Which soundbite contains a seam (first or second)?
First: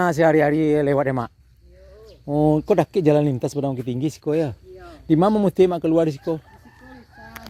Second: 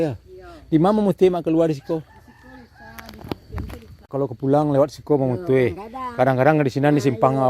second